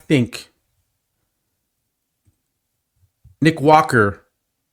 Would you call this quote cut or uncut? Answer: uncut